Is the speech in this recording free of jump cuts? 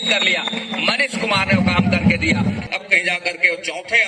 no; 1 cut; at 2.6 s

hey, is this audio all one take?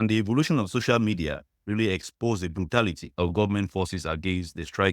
no; 1 cut; at 3.0 s

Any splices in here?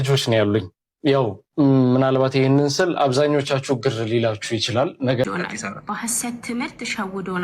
yes; 1 cut; at 5.2 s

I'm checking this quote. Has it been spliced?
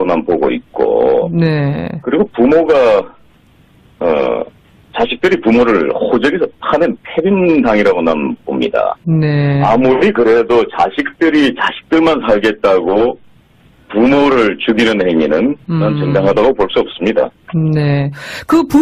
no; 0 cuts

